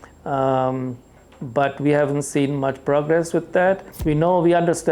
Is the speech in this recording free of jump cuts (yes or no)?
no